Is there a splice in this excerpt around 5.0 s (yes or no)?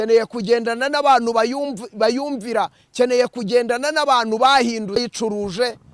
yes